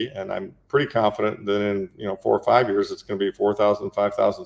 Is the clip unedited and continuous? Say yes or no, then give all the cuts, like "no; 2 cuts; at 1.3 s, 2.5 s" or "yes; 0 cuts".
yes; 0 cuts